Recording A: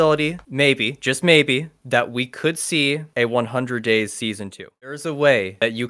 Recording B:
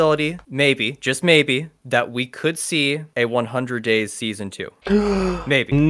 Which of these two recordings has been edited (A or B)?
A